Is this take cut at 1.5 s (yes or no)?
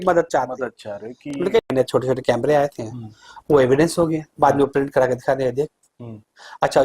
yes